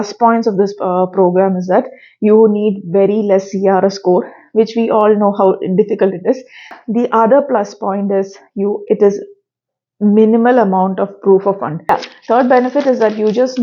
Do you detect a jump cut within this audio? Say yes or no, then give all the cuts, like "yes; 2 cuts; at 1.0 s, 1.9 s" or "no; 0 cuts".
yes; 2 cuts; at 6.7 s, 11.9 s